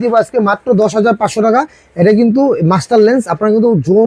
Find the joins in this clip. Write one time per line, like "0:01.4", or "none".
none